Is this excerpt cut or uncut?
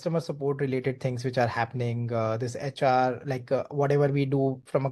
uncut